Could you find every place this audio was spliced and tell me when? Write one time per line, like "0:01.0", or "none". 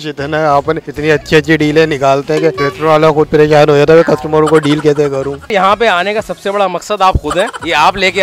0:00.9
0:02.7
0:05.5